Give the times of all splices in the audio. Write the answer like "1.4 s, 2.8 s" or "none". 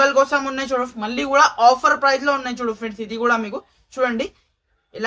none

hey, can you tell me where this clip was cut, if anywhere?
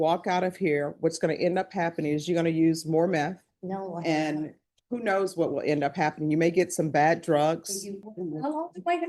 7.9 s

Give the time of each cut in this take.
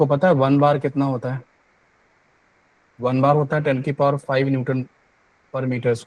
none

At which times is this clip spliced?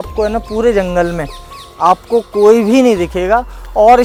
none

